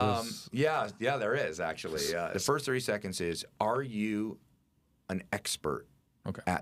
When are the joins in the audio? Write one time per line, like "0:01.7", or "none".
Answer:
0:02.3